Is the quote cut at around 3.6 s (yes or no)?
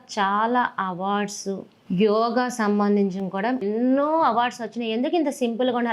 yes